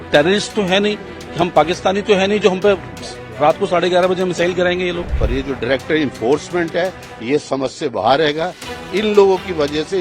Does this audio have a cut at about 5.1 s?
yes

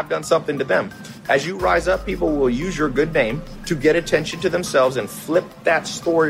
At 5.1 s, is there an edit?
no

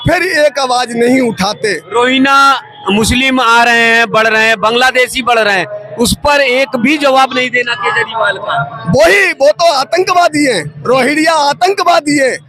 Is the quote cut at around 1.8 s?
yes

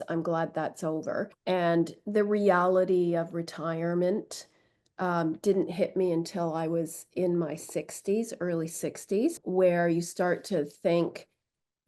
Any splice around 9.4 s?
yes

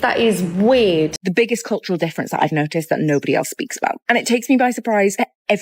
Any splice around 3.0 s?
no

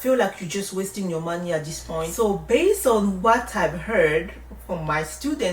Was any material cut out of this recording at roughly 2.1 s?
yes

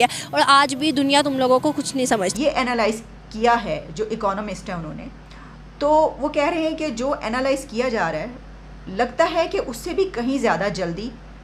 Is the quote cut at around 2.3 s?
yes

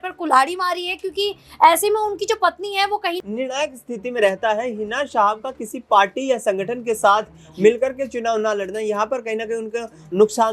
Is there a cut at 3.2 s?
yes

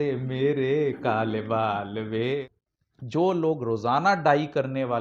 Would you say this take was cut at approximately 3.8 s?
no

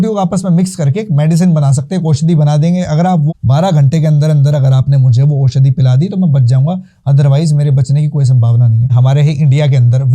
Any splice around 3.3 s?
yes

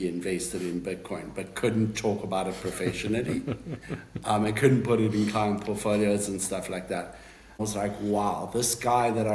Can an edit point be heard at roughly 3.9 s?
no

